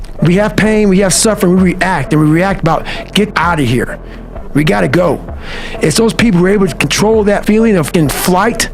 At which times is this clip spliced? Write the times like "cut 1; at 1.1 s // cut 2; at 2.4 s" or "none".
cut 1; at 3.3 s // cut 2; at 7.7 s